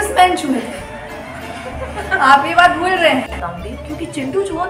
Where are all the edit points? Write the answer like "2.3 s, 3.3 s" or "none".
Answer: 3.4 s

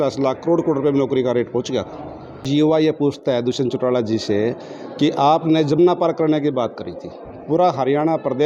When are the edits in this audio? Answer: 2.4 s

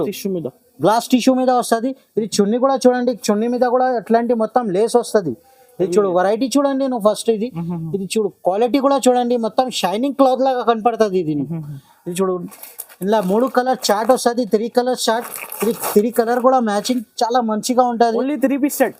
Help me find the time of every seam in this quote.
none

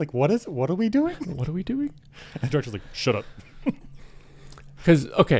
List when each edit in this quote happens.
none

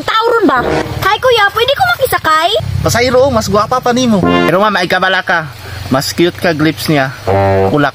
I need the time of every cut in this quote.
0.8 s, 2.6 s, 4.5 s

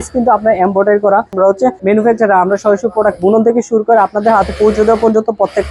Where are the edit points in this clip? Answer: 1.5 s

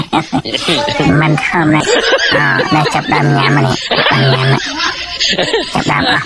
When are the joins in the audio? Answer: 1.8 s

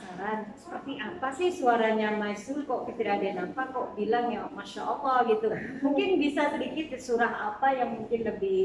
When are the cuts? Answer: none

